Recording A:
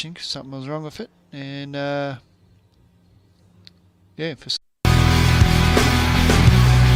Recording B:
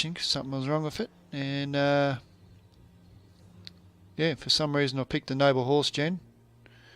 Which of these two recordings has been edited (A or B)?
B